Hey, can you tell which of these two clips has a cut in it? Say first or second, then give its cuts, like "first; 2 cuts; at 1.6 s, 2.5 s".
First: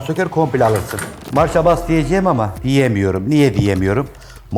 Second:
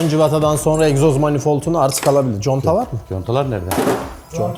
first; 2 cuts; at 1.1 s, 2.5 s